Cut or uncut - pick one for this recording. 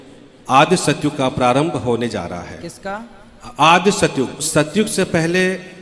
cut